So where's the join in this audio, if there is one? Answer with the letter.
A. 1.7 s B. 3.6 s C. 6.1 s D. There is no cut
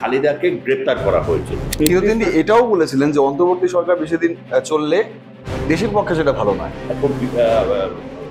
A